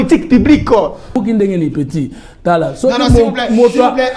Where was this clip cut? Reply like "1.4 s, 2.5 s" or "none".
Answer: 1.2 s